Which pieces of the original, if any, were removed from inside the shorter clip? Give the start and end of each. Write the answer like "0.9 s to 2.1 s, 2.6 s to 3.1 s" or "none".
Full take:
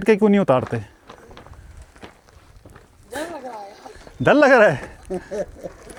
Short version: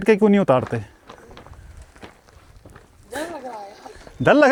none